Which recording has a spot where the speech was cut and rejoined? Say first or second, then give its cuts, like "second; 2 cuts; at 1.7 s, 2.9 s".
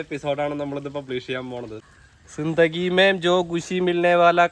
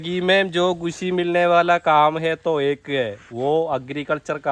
first; 1 cut; at 1.8 s